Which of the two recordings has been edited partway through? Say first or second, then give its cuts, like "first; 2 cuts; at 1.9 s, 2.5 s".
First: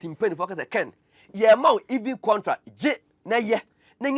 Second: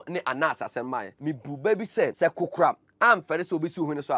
second; 2 cuts; at 1.1 s, 2.1 s